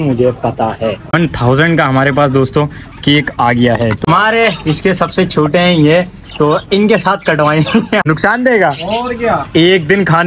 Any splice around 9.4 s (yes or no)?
no